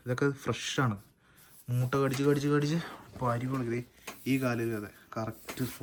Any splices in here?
no; 0 cuts

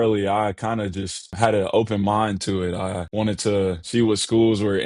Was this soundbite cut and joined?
yes; 3 cuts; at 1.3 s, 3.0 s, 3.9 s

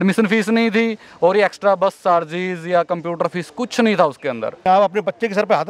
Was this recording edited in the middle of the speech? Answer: yes; 1 cut; at 4.6 s

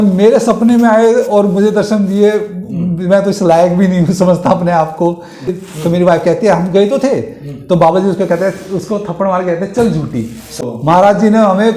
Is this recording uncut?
no; 2 cuts; at 5.6 s, 10.6 s

